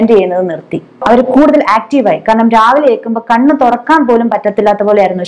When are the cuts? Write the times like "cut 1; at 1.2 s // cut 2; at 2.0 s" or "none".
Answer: cut 1; at 1.0 s